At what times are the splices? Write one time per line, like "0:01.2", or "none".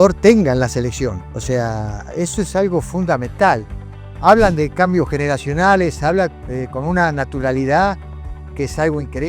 0:01.3